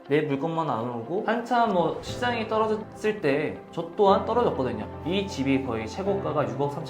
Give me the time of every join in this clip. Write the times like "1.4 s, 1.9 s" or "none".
1.2 s, 4.9 s